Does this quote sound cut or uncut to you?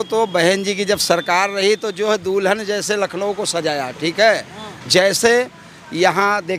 uncut